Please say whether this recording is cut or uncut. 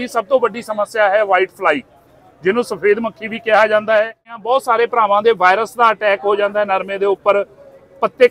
cut